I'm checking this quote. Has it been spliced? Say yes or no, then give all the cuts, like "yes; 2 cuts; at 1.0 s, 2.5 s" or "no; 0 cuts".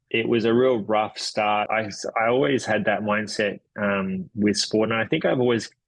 yes; 1 cut; at 1.7 s